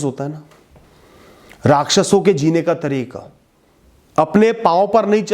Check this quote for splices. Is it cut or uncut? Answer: cut